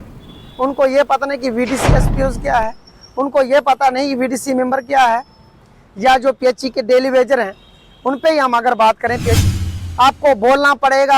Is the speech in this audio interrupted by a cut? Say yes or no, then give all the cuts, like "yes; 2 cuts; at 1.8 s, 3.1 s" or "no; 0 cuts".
yes; 1 cut; at 9.4 s